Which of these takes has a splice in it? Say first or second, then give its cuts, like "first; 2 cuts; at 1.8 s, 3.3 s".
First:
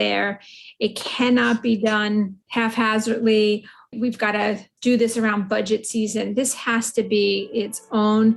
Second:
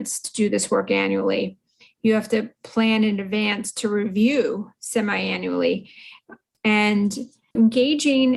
first; 1 cut; at 2.4 s